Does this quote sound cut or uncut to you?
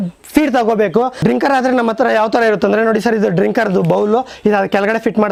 uncut